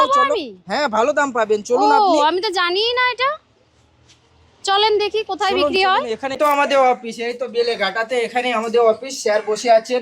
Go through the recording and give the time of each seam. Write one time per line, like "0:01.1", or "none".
0:05.8